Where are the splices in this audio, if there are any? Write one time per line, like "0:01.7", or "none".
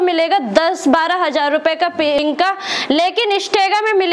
0:02.2